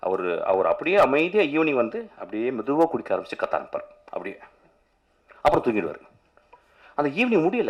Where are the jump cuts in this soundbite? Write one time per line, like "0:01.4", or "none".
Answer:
none